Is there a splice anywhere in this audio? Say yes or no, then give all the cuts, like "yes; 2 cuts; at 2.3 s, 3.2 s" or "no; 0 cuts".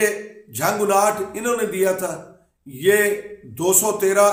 no; 0 cuts